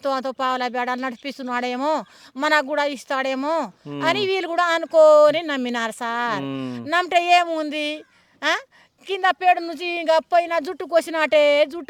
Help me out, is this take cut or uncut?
uncut